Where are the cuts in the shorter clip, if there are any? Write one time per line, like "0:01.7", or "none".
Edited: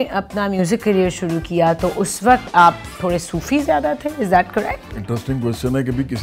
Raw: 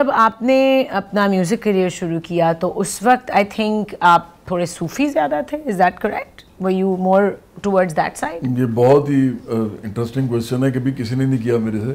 0:02.5
0:04.9